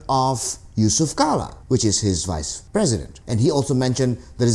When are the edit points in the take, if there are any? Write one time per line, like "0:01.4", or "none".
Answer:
0:01.5
0:02.5
0:03.1